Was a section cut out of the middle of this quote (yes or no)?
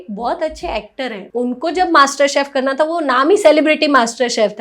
yes